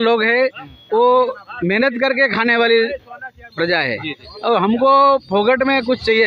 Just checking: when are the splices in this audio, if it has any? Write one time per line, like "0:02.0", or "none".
none